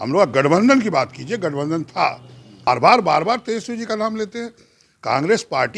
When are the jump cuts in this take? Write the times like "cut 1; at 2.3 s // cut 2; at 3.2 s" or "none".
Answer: cut 1; at 2.7 s